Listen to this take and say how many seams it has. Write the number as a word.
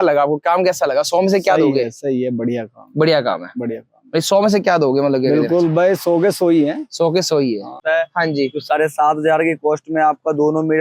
one